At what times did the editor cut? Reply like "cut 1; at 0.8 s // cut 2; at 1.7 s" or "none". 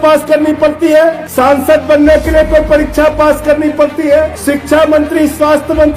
cut 1; at 1.2 s // cut 2; at 4.4 s